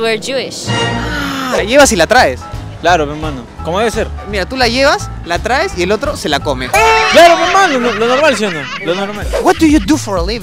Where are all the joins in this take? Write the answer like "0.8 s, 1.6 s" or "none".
1.6 s, 9.3 s